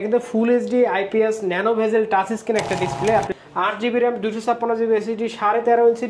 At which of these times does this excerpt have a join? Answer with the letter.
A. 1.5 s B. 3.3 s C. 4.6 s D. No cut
B